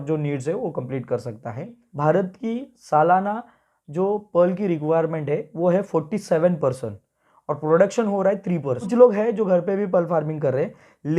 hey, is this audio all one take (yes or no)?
no